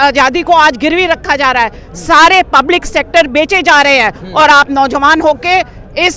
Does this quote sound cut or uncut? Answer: uncut